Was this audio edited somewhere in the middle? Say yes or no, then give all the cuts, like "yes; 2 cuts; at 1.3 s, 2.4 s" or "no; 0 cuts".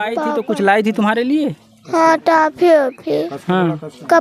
no; 0 cuts